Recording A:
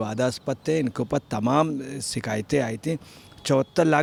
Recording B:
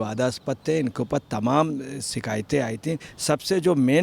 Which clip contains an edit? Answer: B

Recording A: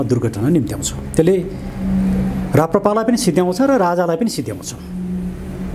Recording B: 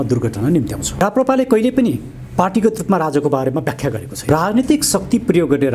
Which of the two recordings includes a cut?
B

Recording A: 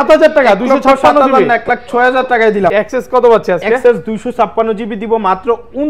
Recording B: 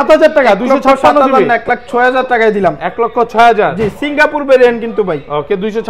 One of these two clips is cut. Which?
A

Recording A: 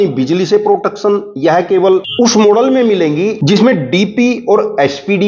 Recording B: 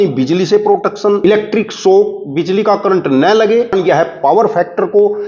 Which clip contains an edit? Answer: B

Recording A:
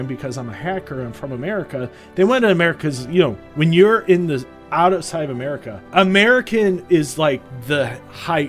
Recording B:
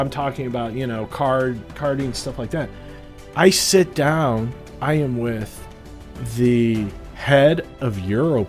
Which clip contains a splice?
A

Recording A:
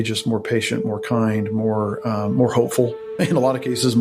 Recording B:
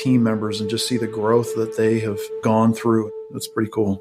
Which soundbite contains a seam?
B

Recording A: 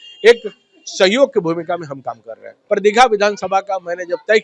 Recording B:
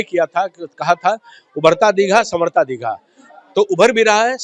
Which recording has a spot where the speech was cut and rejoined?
A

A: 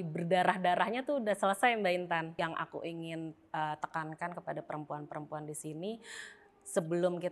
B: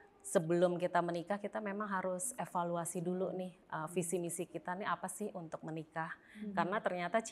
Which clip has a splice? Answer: A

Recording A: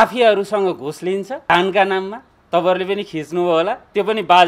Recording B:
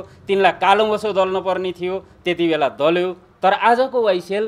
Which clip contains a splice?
A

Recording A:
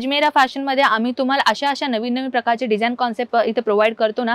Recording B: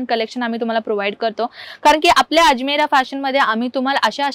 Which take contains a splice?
B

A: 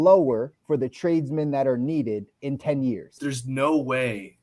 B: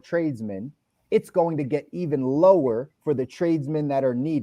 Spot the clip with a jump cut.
A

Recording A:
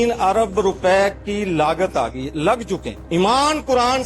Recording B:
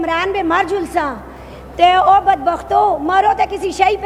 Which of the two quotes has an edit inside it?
A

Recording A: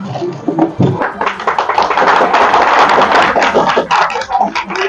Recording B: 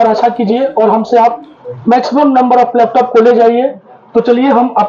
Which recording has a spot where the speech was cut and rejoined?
A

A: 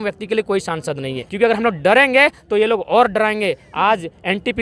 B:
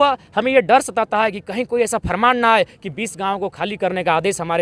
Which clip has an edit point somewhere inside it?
A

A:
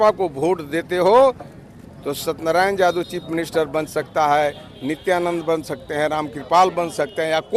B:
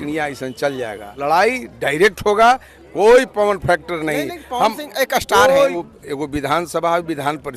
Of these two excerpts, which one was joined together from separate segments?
B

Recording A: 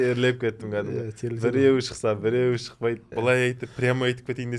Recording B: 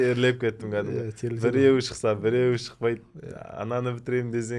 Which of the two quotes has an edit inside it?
A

